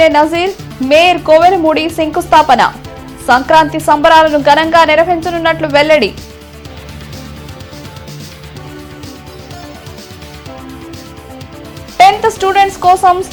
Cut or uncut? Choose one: uncut